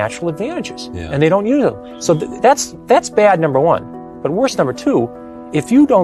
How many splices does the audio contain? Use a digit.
0